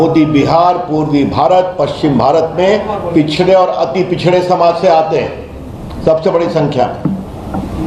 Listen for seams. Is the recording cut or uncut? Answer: uncut